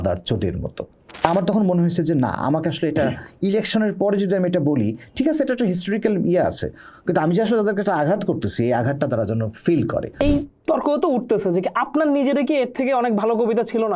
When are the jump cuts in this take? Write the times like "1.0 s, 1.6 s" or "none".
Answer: 1.2 s, 10.1 s